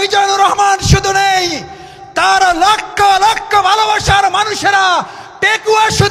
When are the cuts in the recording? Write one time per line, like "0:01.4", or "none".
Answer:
none